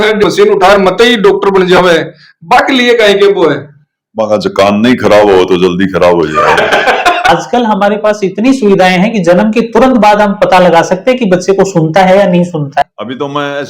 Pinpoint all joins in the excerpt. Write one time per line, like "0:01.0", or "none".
0:07.3
0:12.8